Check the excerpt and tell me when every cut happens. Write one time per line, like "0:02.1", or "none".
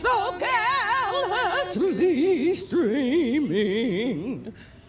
0:01.9